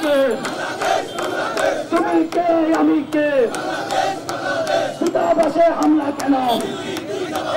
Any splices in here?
no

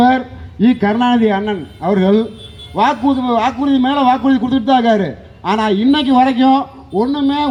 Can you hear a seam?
no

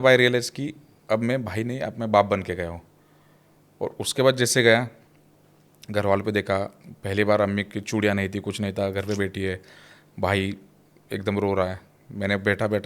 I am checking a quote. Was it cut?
no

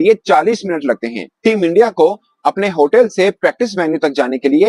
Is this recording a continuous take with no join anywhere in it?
yes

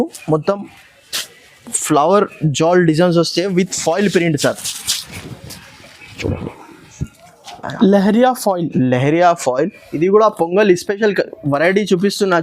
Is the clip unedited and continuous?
no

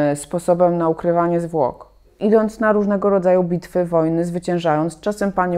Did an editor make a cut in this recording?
yes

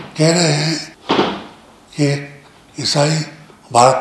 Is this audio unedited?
no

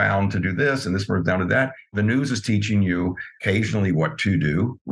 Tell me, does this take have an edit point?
yes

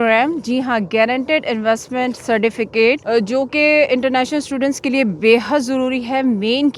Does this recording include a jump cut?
no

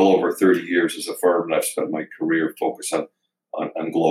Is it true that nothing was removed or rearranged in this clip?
yes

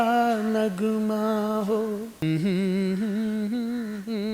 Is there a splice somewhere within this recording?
yes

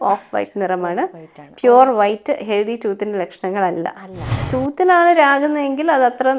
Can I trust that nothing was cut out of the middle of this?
no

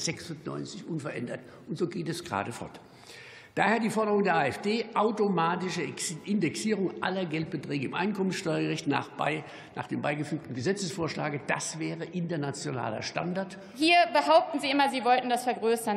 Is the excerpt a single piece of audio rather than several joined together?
no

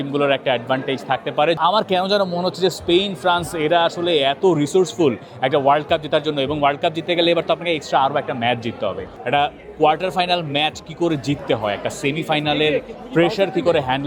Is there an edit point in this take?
yes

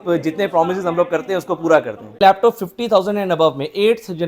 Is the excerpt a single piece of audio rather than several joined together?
no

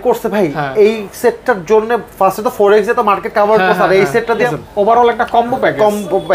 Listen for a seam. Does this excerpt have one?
yes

